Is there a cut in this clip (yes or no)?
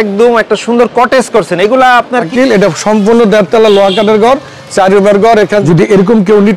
yes